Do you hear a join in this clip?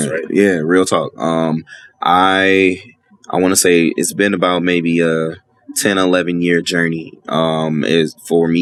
no; 0 cuts

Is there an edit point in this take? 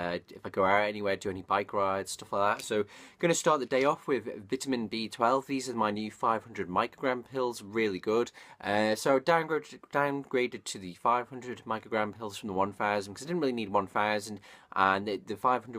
yes; 1 cut; at 12.9 s

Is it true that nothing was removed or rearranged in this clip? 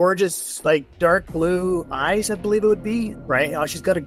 yes; 0 cuts

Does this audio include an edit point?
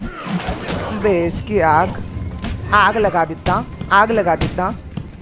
no; 0 cuts

